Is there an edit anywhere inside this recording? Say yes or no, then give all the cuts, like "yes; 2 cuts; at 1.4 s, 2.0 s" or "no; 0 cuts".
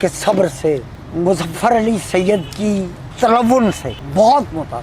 yes; 3 cuts; at 1.0 s, 3.1 s, 3.9 s